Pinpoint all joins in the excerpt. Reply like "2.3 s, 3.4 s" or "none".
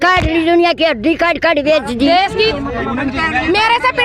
2.5 s